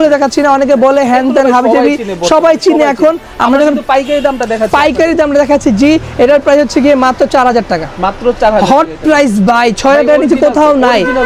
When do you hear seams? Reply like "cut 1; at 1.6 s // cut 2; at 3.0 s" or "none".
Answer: none